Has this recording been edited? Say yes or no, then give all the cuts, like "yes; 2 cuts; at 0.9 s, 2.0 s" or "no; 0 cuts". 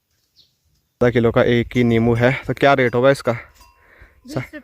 yes; 1 cut; at 1.0 s